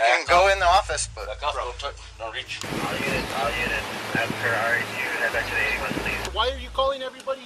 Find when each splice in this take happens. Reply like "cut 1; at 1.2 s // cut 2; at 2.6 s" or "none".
cut 1; at 2.5 s // cut 2; at 6.3 s